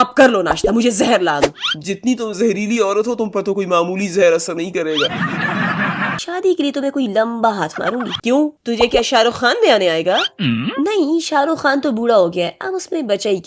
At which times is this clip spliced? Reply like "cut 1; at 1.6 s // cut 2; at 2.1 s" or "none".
cut 1; at 6.2 s // cut 2; at 8.1 s